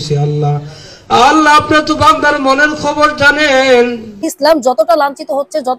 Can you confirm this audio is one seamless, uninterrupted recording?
no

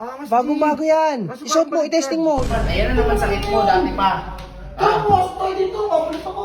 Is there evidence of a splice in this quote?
yes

